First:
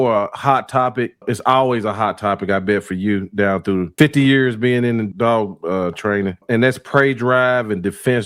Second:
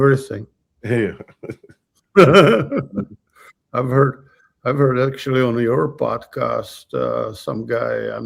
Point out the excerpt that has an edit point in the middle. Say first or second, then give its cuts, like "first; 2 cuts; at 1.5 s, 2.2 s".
first; 4 cuts; at 1.2 s, 3.9 s, 5.1 s, 6.4 s